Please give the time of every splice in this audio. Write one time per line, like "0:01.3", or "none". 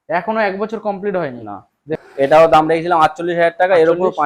0:02.0